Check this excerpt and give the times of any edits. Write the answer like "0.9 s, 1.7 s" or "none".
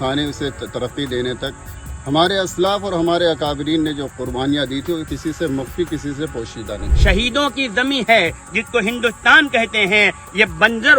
6.9 s